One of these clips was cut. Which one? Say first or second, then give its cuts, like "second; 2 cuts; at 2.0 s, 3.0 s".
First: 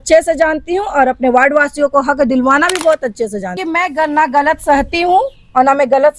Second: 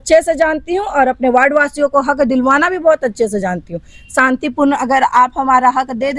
first; 1 cut; at 3.6 s